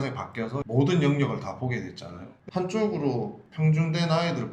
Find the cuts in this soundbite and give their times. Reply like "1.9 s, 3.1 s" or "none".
3.4 s